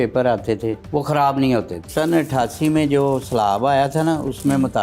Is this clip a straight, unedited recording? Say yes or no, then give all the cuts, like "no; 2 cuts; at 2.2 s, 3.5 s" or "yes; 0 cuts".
no; 2 cuts; at 0.8 s, 1.9 s